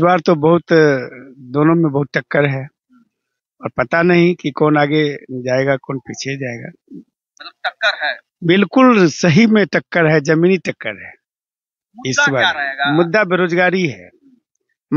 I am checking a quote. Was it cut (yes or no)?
no